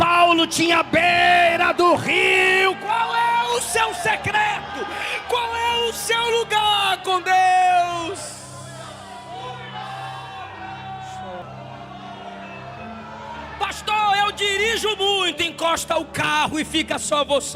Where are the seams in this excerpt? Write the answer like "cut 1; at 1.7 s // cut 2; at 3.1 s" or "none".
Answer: cut 1; at 11.4 s